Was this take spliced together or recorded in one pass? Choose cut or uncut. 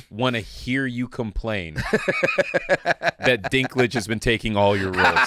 uncut